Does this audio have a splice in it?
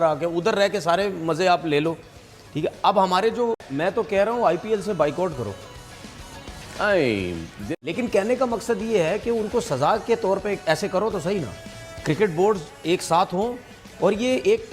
yes; 2 cuts; at 3.6 s, 7.5 s

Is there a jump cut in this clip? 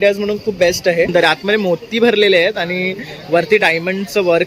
yes; 1 cut; at 1.1 s

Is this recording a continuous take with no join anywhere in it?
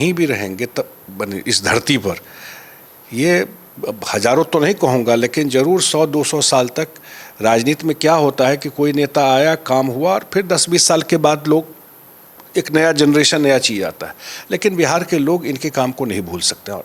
yes; 0 cuts

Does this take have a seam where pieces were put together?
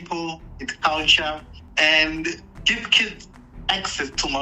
yes; 2 cuts; at 1.6 s, 2.9 s

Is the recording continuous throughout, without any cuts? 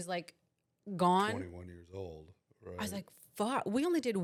yes; 0 cuts

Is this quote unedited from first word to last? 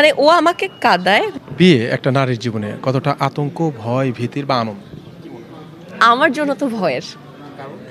no; 1 cut; at 1.3 s

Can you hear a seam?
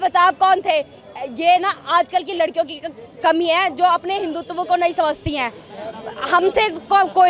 no; 0 cuts

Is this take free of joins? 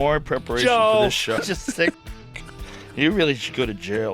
no; 1 cut; at 1.4 s

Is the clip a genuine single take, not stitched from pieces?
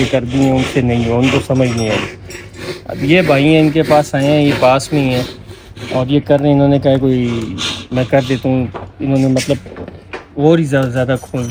yes; 0 cuts

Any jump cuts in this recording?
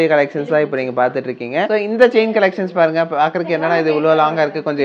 yes; 1 cut; at 1.7 s

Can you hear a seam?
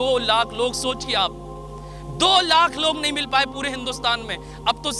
no; 0 cuts

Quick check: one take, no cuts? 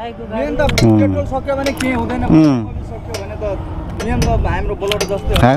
yes; 0 cuts

